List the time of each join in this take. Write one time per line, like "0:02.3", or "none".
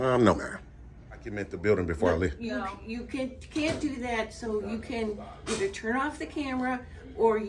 0:01.5